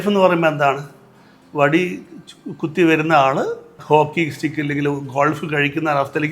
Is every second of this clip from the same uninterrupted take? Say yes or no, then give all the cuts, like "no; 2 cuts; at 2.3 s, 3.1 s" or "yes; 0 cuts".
no; 1 cut; at 3.7 s